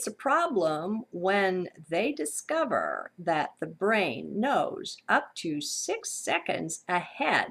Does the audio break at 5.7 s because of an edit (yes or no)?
yes